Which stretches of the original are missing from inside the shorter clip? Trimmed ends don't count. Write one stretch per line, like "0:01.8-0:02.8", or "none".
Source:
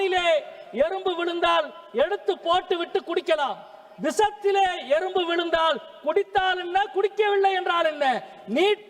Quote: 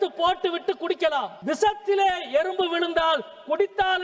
0:03.6-0:03.9

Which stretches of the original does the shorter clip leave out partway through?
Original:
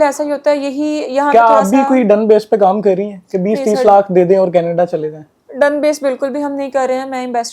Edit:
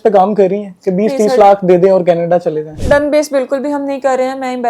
0:05.2-0:05.4

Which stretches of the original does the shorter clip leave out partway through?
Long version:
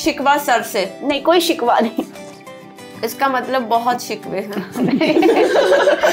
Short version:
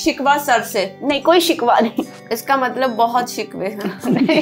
0:02.2-0:03.0

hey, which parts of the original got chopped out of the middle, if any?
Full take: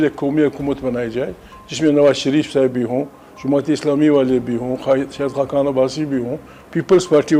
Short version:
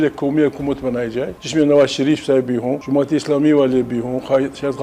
0:01.4-0:01.6
0:03.0-0:03.3

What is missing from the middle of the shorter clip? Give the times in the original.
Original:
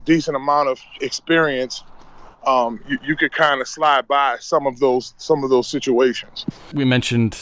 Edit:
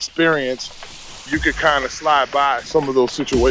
0:02.4-0:03.0
0:04.4-0:05.2

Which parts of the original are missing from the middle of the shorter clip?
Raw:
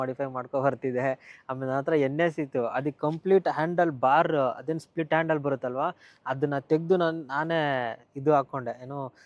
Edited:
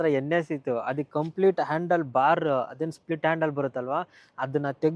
none

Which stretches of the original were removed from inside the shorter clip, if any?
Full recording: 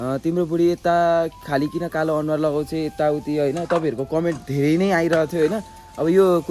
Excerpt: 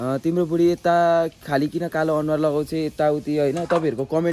none

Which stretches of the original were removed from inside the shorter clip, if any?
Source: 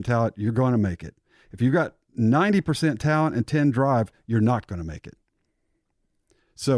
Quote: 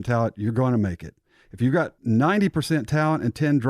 0:02.0-0:02.1

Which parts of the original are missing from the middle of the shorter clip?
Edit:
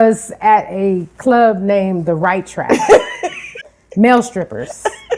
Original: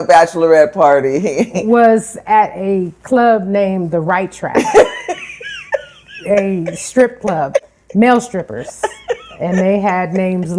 0:05.6-0:07.7

